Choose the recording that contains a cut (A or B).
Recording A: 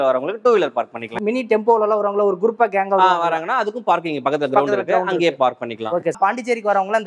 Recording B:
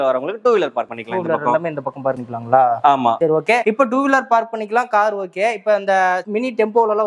A